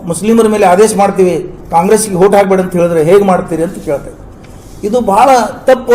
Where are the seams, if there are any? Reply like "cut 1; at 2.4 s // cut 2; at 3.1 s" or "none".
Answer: none